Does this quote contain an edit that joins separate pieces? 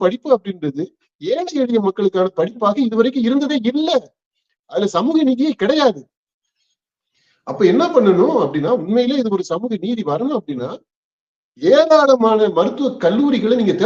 no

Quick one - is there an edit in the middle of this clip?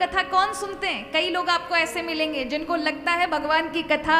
no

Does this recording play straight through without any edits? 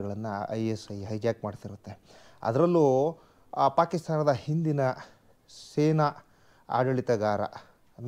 yes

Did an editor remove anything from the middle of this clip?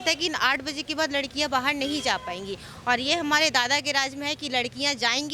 no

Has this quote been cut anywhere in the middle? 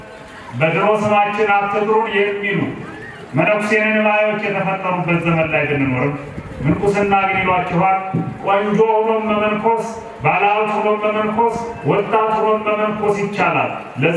no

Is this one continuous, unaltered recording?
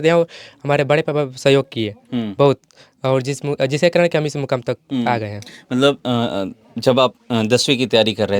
yes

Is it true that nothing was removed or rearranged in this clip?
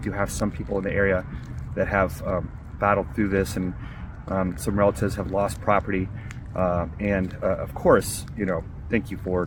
yes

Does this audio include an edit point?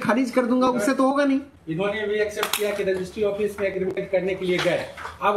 yes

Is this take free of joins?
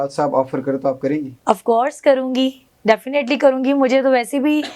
yes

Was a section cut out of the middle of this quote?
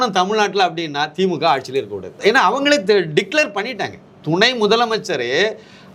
yes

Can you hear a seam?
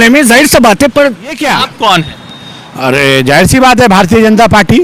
yes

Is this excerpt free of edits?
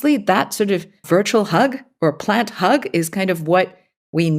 no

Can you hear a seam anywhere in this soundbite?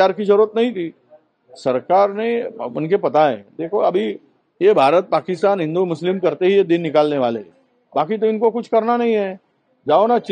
no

